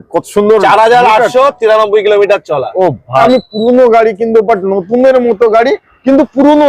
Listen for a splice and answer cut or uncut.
cut